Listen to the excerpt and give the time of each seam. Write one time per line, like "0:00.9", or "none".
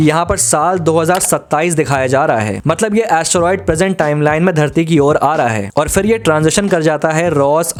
none